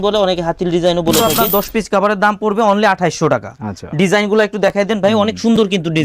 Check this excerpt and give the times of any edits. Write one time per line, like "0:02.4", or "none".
0:01.2